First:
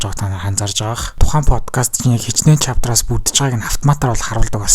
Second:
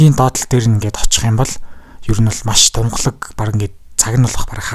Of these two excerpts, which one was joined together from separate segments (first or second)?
first